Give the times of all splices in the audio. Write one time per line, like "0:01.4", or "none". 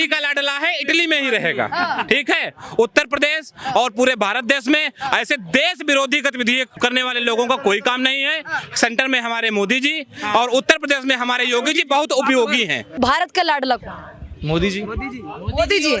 0:06.7
0:13.0